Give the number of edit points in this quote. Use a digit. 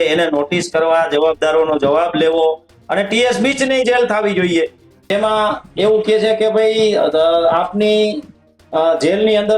1